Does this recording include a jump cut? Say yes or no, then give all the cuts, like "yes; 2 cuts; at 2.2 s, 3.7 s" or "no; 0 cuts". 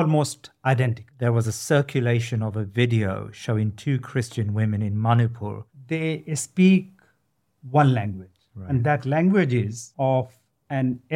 yes; 3 cuts; at 1.0 s, 5.7 s, 9.8 s